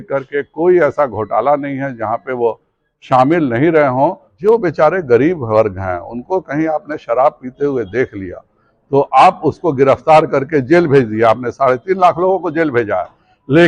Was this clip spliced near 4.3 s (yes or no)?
yes